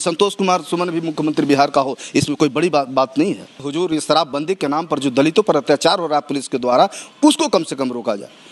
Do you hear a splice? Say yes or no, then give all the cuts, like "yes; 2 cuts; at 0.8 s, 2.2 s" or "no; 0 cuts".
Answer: yes; 1 cut; at 3.5 s